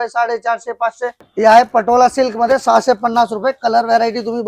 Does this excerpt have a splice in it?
yes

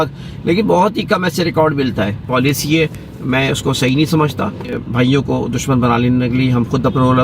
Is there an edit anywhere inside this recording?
yes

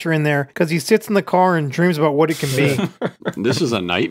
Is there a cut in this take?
yes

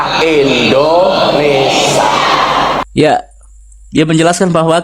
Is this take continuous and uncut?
yes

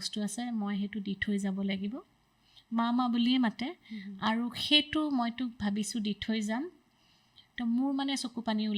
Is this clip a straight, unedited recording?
yes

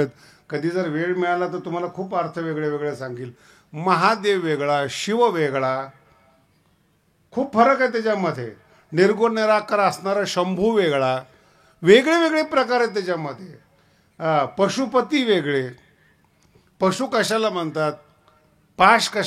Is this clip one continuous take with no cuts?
yes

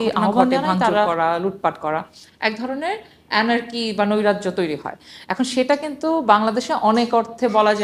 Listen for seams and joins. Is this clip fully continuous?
yes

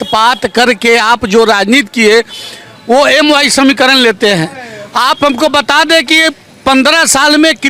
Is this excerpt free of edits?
yes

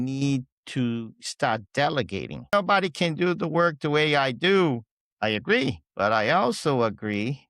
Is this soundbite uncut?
no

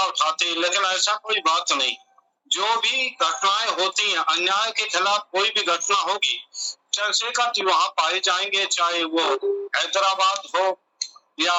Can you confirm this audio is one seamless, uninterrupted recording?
yes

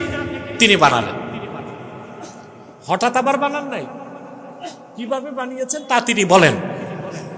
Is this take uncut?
yes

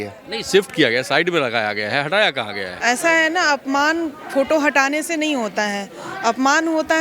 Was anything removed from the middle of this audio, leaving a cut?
yes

